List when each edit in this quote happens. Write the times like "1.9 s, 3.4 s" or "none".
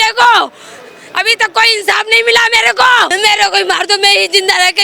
3.1 s